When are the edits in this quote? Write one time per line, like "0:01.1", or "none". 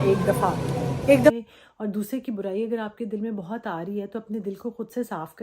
0:01.3